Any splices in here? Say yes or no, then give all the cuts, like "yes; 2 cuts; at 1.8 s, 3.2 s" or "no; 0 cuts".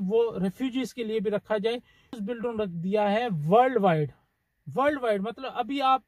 yes; 1 cut; at 2.2 s